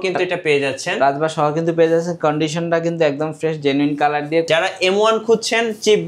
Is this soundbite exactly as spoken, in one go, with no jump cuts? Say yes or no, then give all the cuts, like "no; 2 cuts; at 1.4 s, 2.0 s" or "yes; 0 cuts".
no; 1 cut; at 4.5 s